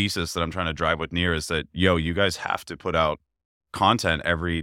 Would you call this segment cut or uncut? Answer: uncut